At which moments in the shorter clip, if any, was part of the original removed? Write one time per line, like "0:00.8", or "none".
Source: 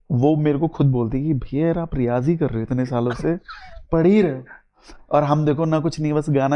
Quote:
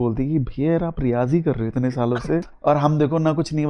0:02.5